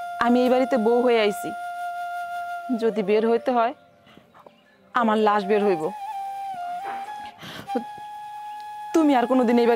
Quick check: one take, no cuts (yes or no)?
yes